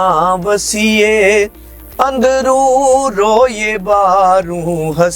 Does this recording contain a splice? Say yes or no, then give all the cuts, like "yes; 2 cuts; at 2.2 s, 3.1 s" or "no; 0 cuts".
no; 0 cuts